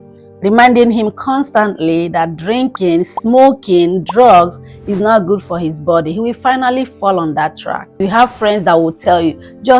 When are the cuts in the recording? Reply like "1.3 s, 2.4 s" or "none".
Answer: 8.0 s